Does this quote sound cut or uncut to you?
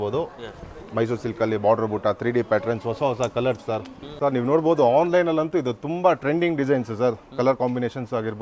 cut